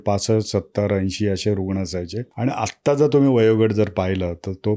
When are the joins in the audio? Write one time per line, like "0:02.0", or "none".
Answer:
0:02.2